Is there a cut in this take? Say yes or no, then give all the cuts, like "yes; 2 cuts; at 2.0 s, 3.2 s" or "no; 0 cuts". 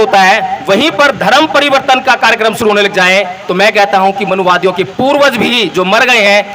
no; 0 cuts